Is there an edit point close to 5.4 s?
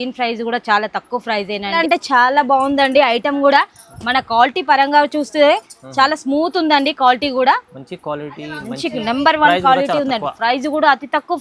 no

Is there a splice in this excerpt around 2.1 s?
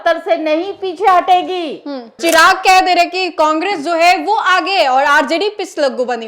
yes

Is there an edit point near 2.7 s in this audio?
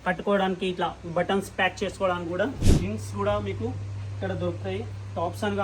yes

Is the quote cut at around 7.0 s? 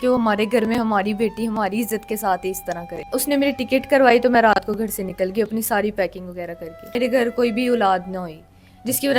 yes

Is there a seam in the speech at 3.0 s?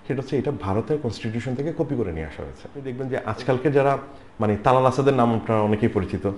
yes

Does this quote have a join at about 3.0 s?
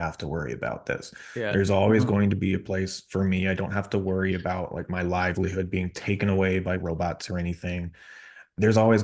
no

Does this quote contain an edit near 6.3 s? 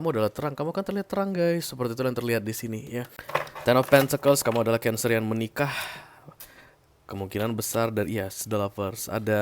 no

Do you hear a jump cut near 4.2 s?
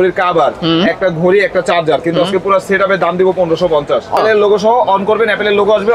yes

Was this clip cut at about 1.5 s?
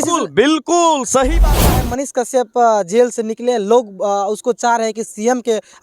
yes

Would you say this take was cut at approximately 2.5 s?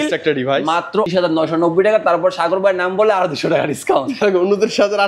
no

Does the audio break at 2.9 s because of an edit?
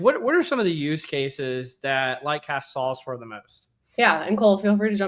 no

